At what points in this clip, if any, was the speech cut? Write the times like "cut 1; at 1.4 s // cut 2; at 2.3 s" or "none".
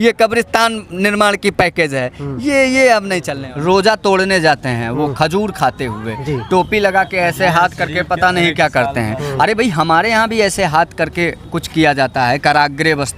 cut 1; at 3.3 s